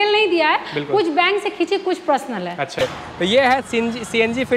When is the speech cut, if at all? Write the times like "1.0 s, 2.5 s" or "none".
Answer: 2.8 s